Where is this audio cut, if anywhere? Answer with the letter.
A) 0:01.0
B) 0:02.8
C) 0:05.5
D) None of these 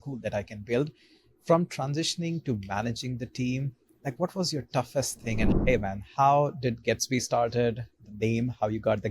C